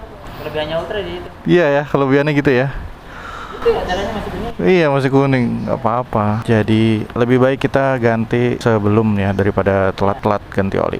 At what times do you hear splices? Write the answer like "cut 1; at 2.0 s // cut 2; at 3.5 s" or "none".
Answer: cut 1; at 6.4 s // cut 2; at 7.1 s // cut 3; at 8.6 s // cut 4; at 10.2 s